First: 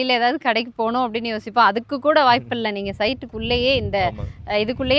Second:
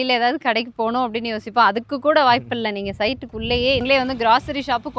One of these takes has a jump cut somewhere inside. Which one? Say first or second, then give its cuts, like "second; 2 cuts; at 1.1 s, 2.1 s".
second; 1 cut; at 3.8 s